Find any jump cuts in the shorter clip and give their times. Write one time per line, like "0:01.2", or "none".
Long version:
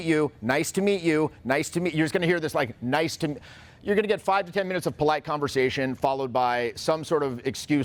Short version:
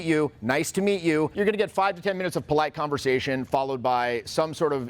0:01.3